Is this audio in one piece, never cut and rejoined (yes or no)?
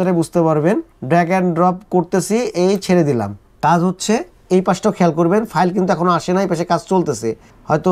yes